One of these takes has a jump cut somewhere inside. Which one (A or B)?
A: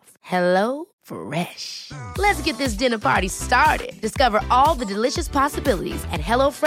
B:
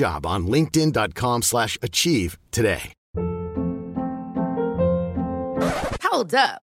B